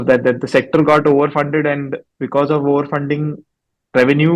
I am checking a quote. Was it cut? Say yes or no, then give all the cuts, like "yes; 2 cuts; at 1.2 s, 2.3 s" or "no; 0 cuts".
no; 0 cuts